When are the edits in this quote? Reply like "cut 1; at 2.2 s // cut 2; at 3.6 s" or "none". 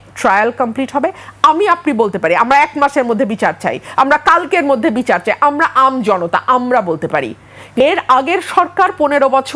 cut 1; at 7.8 s